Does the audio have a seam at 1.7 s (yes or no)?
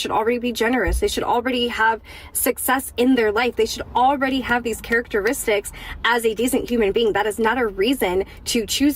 no